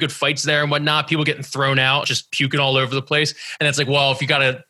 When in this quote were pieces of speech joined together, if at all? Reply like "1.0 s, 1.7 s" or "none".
2.1 s